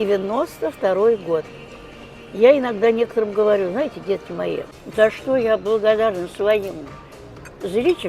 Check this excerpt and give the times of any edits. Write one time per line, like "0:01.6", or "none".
0:04.8